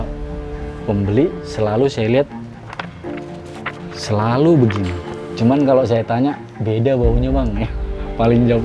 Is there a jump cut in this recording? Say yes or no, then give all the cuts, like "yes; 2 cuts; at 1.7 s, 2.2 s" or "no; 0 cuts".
yes; 1 cut; at 5.0 s